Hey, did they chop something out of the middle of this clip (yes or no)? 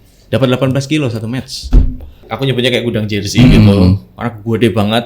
yes